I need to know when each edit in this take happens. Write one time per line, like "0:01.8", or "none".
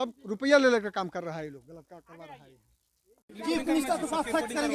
0:03.3